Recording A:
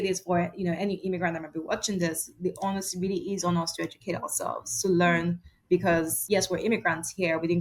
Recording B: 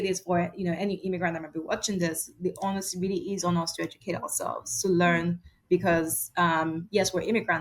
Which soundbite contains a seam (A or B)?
A